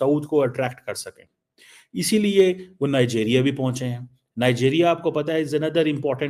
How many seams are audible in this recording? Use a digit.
0